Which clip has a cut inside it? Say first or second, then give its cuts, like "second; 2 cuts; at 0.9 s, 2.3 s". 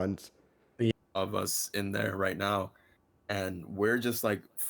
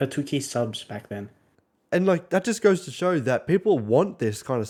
first; 1 cut; at 0.9 s